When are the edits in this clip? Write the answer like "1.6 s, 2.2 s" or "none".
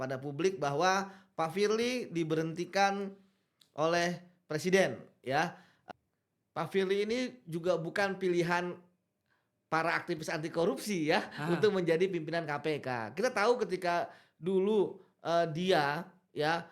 5.7 s